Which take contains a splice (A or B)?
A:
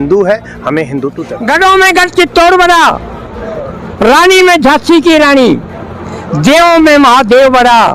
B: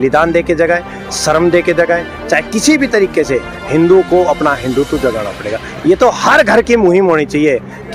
A